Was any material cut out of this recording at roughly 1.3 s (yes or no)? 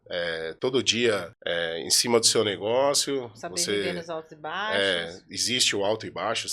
yes